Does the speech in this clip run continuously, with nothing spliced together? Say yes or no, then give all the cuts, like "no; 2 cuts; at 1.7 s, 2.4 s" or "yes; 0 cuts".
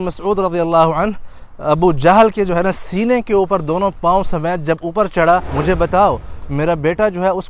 no; 1 cut; at 5.5 s